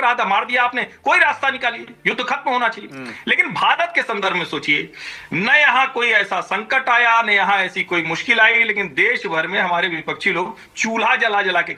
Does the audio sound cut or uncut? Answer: uncut